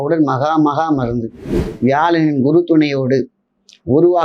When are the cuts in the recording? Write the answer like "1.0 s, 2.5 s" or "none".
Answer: 1.6 s